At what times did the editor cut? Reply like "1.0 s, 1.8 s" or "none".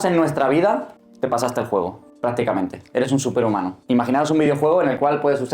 1.0 s, 2.0 s, 3.7 s